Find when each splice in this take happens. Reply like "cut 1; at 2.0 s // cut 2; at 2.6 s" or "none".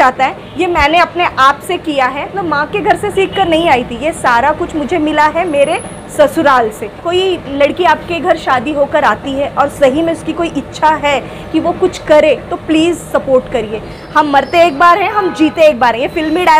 cut 1; at 2.4 s // cut 2; at 7.1 s // cut 3; at 13.9 s

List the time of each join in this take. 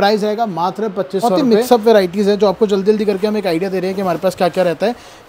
cut 1; at 1.3 s

